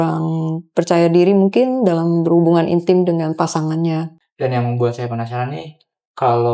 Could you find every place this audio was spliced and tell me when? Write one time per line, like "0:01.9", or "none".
0:04.2